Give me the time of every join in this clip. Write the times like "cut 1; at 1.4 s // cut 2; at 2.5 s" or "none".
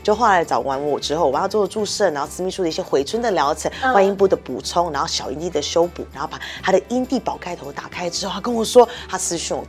none